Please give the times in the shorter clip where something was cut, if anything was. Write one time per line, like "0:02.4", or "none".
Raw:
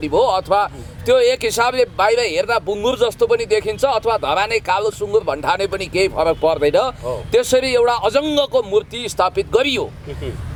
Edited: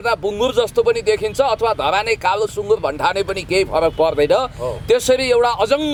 none